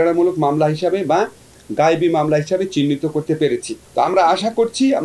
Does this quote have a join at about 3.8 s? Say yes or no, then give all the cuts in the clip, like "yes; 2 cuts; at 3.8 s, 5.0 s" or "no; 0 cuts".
yes; 1 cut; at 3.8 s